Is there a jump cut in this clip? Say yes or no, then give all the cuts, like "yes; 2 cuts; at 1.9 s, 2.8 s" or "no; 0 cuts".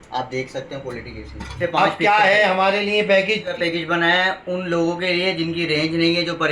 yes; 2 cuts; at 1.5 s, 3.5 s